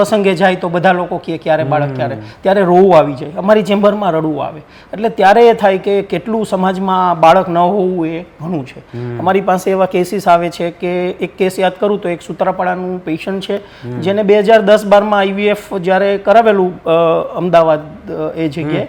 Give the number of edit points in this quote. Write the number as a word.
zero